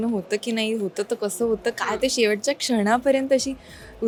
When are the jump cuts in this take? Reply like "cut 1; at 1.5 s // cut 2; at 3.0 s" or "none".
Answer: none